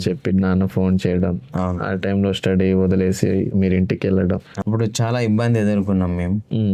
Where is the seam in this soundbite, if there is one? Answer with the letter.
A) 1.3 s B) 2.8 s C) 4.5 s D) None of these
C